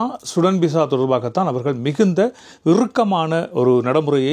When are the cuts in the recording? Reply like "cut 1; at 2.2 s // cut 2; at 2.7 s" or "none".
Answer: none